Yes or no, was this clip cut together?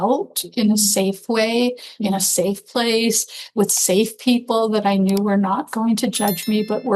no